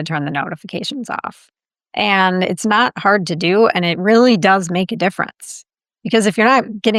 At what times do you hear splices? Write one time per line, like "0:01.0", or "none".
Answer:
none